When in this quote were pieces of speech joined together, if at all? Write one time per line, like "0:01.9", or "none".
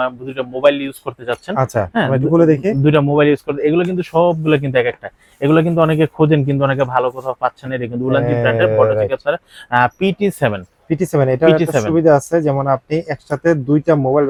none